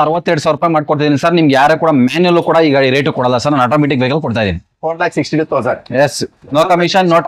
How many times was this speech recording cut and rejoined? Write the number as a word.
zero